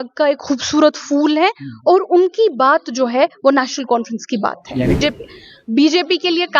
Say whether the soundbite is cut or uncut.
cut